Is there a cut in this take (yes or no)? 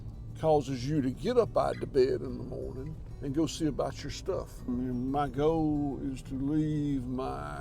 yes